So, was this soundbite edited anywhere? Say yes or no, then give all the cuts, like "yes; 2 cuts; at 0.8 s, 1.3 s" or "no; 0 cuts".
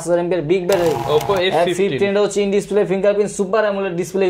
yes; 1 cut; at 1.0 s